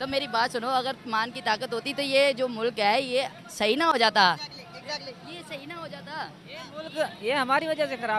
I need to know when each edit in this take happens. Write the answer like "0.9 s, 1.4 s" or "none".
none